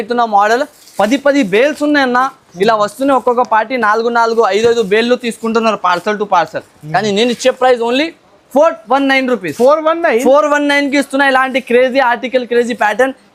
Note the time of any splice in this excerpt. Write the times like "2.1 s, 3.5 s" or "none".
none